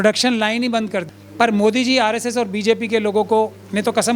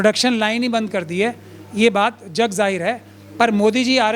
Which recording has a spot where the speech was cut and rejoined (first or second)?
first